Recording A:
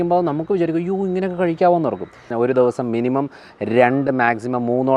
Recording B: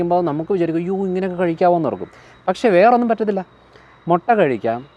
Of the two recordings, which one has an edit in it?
A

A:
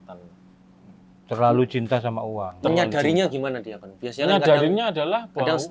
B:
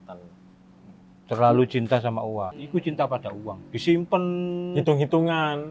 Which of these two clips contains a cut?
B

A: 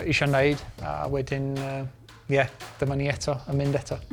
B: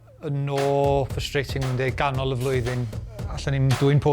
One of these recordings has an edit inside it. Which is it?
B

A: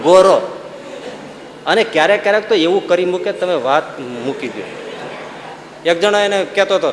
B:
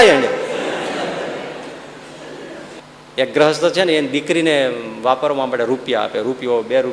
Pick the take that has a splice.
B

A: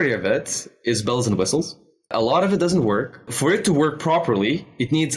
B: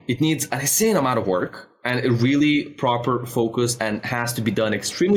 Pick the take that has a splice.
A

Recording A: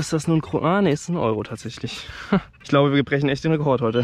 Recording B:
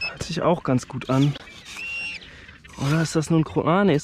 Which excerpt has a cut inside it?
A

